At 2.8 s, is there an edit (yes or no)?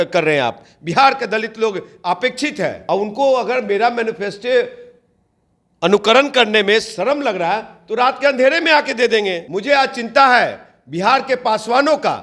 yes